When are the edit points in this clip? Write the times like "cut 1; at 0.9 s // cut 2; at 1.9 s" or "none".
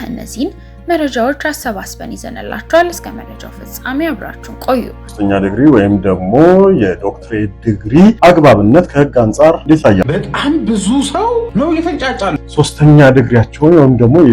cut 1; at 5.1 s // cut 2; at 8.2 s // cut 3; at 9.7 s // cut 4; at 11.5 s // cut 5; at 12.4 s

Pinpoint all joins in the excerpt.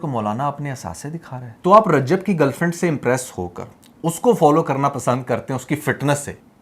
cut 1; at 1.5 s

